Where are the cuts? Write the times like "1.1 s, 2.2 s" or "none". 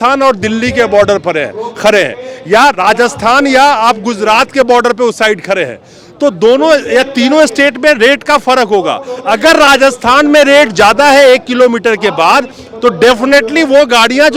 none